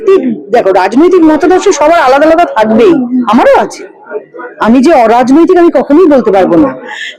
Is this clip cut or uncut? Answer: uncut